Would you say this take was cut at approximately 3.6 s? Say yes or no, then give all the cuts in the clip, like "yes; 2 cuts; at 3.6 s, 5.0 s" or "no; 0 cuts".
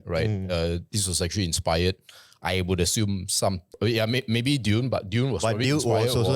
yes; 1 cut; at 3.6 s